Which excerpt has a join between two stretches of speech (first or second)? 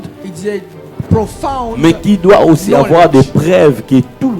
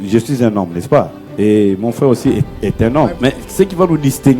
second